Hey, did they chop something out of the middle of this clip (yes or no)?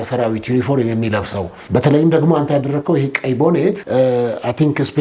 yes